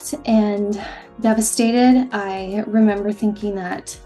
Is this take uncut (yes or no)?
yes